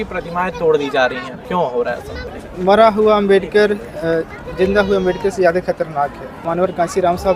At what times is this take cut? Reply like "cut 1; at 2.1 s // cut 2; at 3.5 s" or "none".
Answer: cut 1; at 1.3 s // cut 2; at 2.3 s // cut 3; at 6.4 s